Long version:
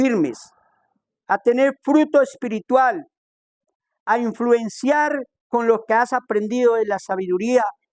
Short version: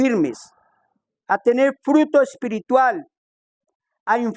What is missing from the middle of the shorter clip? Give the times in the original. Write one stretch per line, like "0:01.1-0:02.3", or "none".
none